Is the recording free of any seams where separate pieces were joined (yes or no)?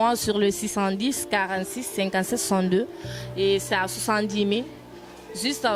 yes